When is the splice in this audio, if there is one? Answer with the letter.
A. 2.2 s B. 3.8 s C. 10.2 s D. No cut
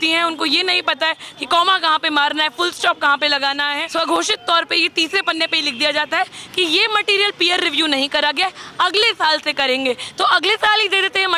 B